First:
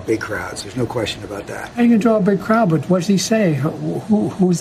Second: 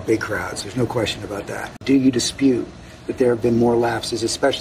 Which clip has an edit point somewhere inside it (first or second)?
second